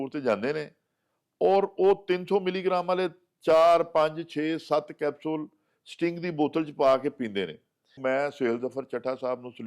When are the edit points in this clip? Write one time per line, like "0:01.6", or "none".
0:08.0